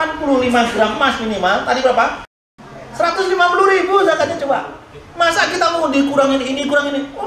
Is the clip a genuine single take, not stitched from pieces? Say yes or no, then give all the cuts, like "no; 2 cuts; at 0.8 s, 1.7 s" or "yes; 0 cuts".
no; 1 cut; at 2.3 s